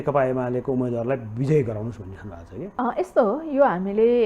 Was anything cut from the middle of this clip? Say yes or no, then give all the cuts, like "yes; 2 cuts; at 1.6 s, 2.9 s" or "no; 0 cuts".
yes; 1 cut; at 2.6 s